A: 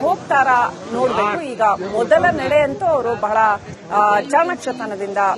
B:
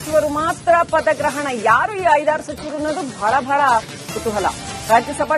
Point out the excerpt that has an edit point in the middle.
B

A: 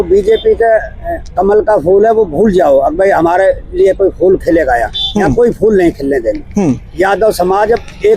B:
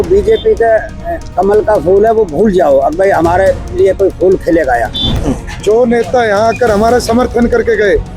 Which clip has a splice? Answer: B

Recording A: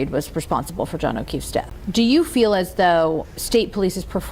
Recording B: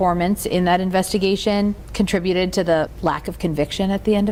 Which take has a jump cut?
A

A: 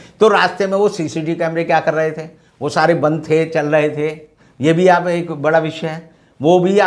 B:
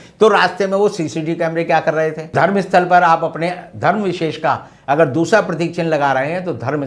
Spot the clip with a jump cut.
B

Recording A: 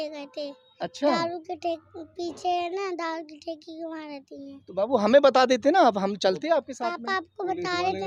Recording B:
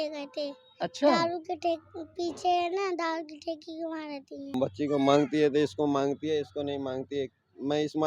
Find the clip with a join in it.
B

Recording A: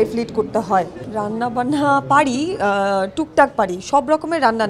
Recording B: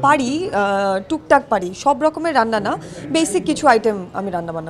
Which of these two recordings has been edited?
A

